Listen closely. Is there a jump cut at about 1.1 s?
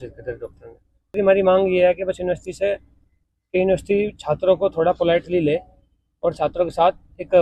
yes; 1 cut; at 1.1 s

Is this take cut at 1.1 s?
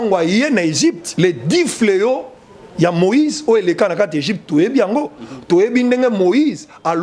yes; 1 cut; at 1.1 s

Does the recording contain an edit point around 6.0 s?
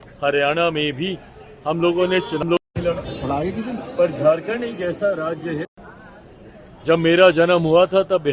no; 0 cuts

